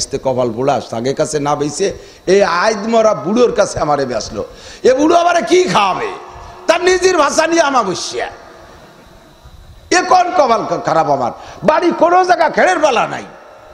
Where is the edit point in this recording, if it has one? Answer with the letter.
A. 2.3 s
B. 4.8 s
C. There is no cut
C